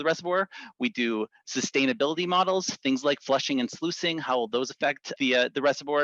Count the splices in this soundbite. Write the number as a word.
one